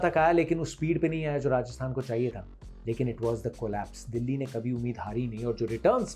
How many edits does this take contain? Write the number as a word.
zero